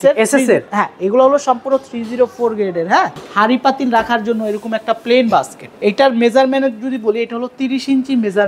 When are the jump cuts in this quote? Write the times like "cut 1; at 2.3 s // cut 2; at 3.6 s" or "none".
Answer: cut 1; at 3.2 s // cut 2; at 5.6 s